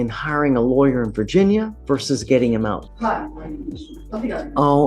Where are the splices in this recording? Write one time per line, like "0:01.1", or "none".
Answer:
0:01.8
0:02.9
0:03.9